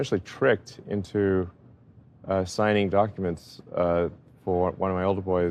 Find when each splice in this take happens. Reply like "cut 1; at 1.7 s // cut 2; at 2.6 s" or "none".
none